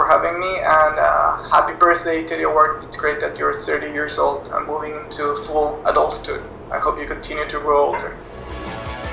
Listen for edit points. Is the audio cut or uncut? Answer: cut